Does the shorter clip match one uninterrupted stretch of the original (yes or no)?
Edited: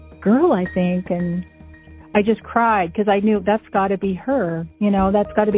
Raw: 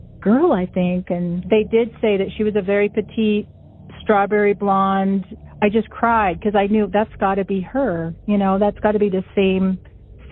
no